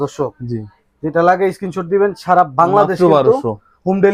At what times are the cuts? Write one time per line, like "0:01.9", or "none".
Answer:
none